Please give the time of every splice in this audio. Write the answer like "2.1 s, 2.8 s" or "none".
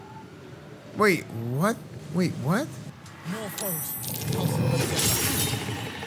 0.9 s, 1.9 s, 2.9 s